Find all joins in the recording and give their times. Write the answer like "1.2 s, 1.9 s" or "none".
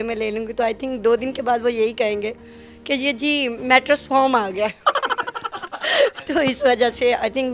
none